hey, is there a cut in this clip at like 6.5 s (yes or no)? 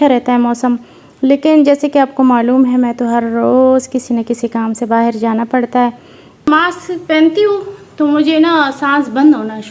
yes